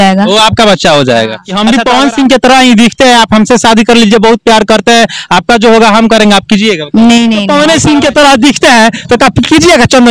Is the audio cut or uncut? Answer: cut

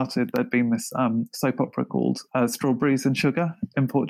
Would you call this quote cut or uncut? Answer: uncut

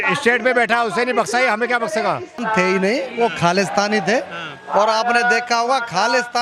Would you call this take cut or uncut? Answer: cut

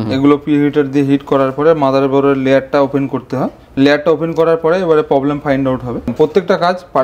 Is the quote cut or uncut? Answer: cut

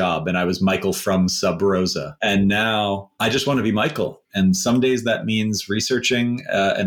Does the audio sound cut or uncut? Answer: cut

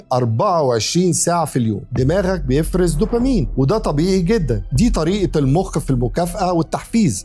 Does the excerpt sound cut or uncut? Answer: cut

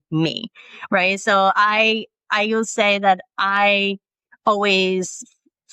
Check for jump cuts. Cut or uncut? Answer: uncut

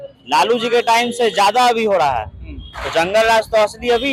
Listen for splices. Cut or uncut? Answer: uncut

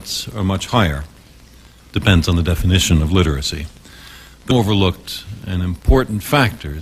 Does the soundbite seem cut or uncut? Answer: uncut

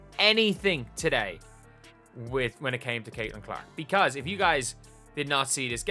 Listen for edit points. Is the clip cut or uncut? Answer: uncut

